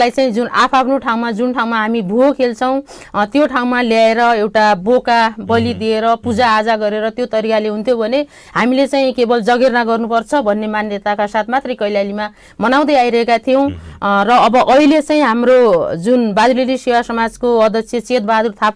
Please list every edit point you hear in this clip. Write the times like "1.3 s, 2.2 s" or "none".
none